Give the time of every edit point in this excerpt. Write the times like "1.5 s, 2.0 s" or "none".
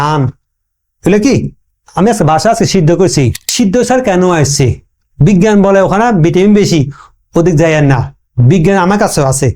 3.4 s